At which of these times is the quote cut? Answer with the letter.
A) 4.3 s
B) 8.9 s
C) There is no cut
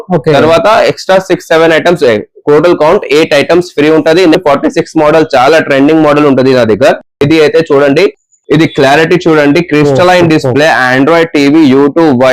A